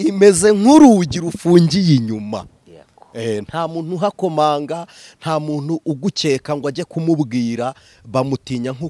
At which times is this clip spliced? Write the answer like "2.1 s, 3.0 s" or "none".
none